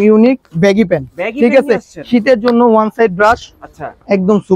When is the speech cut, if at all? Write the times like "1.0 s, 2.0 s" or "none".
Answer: none

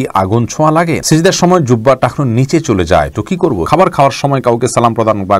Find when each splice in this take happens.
1.0 s, 3.6 s

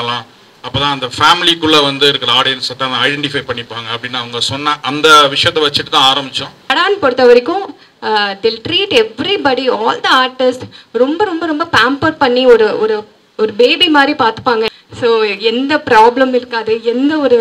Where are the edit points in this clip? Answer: 6.7 s, 14.7 s

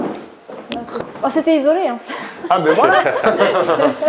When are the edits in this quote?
1.0 s

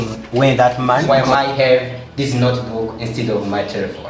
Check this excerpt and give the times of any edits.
1.0 s

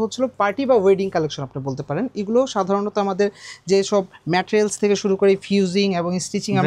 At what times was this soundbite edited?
none

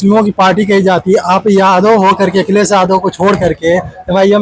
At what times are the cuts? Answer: none

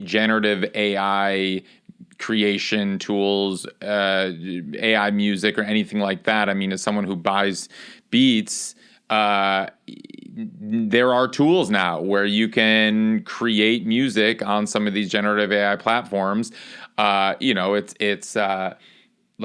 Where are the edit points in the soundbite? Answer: none

